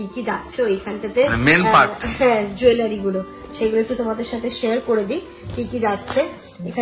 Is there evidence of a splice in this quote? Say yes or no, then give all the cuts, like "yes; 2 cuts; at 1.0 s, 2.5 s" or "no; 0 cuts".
no; 0 cuts